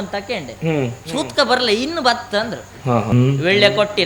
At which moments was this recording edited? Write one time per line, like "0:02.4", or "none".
0:03.1